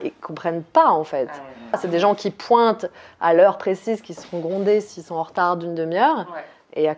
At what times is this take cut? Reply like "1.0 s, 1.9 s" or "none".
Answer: 2.0 s